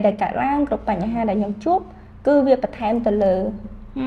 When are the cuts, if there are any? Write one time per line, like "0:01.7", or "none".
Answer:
none

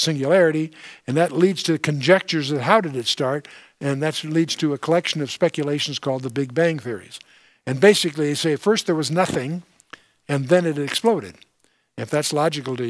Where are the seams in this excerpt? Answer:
0:04.0

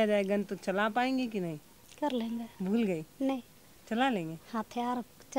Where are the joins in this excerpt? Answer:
none

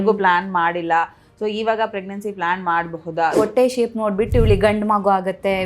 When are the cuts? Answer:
0:03.4

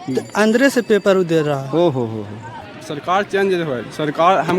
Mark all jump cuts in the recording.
0:02.7

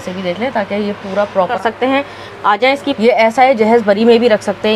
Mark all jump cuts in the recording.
0:01.5
0:02.9

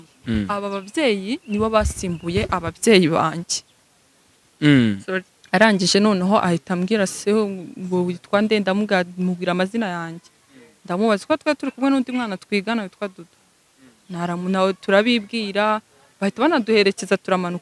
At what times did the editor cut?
0:05.3

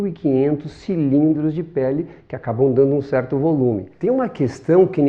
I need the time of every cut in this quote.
0:03.9

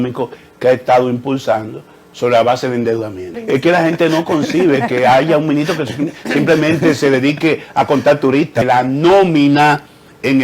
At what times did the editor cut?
0:03.4
0:08.6

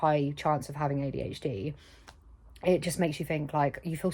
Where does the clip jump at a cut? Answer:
none

